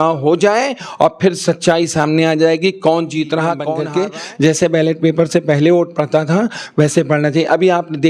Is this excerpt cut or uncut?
cut